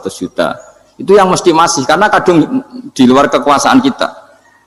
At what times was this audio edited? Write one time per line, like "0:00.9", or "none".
none